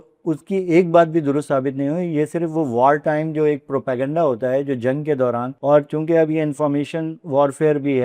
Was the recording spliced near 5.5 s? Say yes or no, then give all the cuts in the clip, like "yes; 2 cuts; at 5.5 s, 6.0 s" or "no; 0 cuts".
yes; 1 cut; at 5.5 s